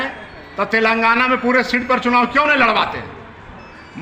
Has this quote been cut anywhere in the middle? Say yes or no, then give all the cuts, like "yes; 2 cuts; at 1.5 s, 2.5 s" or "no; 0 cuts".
no; 0 cuts